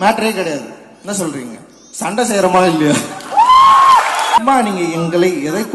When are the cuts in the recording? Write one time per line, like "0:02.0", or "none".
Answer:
0:04.4